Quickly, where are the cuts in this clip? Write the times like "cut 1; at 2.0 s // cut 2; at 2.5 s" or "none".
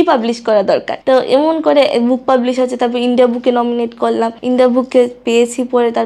cut 1; at 0.9 s // cut 2; at 4.4 s